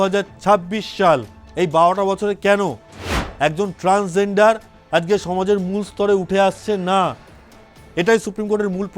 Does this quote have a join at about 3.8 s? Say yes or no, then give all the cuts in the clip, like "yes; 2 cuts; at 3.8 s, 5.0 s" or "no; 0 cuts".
no; 1 cut; at 1.4 s